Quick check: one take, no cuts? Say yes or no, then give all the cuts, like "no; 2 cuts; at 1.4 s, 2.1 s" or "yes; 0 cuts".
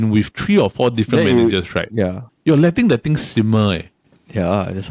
no; 1 cut; at 2.3 s